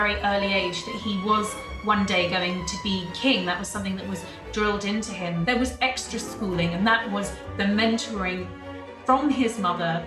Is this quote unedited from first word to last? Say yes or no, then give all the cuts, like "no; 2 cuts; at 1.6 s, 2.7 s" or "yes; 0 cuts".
yes; 0 cuts